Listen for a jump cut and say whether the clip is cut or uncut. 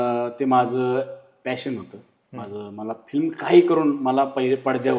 uncut